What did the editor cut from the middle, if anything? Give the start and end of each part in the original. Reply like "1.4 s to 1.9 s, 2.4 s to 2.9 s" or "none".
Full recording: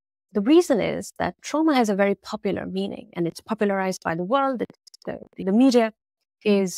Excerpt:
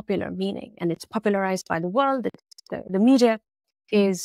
5.1 s to 5.3 s